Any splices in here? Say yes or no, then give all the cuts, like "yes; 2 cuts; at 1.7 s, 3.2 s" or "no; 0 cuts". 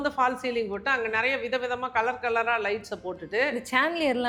no; 0 cuts